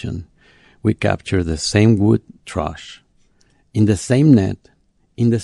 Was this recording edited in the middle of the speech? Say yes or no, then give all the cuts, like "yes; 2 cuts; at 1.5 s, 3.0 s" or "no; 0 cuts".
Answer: yes; 1 cut; at 2.4 s